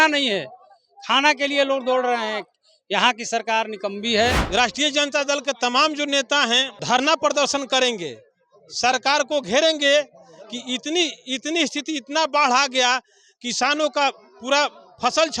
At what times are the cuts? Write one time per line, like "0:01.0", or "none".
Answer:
0:04.4
0:06.8